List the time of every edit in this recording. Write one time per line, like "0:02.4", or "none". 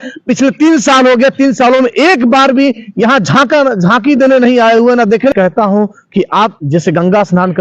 0:05.3